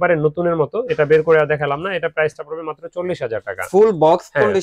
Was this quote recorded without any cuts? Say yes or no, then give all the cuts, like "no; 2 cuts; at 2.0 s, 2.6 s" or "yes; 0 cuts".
yes; 0 cuts